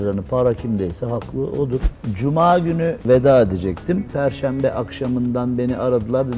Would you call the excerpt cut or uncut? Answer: cut